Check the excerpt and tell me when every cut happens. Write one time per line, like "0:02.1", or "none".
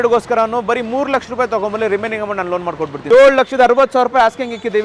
0:02.9